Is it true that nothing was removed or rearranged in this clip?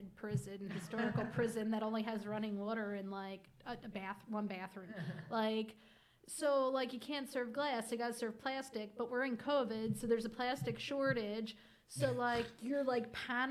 yes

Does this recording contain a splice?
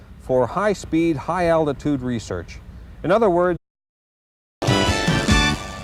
no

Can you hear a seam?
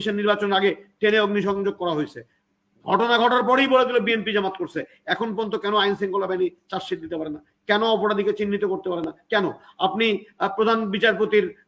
no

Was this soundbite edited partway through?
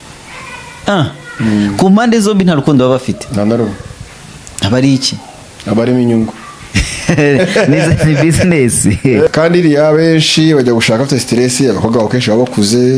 yes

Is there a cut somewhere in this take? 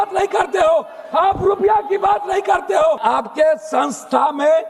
yes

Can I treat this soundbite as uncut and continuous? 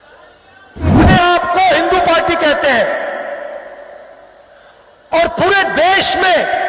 no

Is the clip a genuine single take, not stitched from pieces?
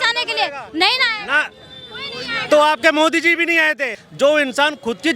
no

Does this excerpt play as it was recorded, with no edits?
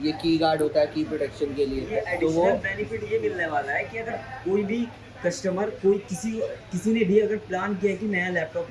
yes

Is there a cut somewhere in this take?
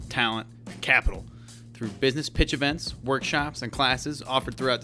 no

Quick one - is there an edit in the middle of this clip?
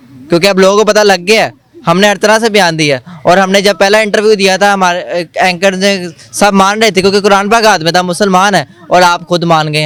no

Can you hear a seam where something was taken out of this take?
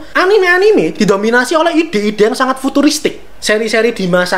yes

